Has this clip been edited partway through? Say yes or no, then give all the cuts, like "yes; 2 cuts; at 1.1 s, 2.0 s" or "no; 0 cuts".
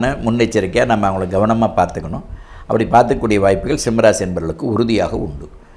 no; 0 cuts